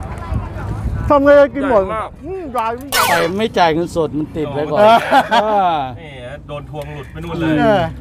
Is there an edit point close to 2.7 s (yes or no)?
yes